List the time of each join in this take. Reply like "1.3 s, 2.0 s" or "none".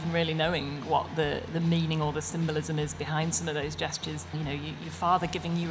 4.4 s